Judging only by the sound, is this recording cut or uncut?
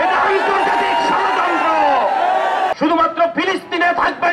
cut